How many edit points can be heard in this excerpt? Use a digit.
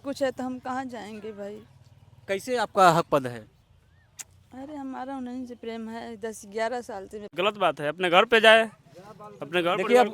1